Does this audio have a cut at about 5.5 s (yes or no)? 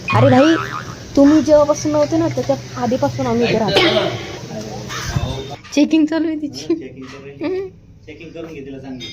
yes